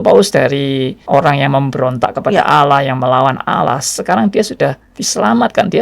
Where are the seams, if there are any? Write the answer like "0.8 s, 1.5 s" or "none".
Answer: 1.0 s